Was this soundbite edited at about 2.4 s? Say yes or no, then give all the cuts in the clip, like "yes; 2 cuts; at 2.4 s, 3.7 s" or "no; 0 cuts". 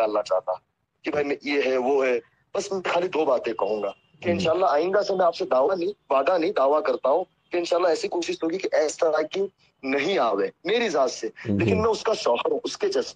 no; 0 cuts